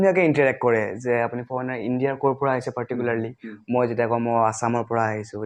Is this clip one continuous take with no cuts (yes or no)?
yes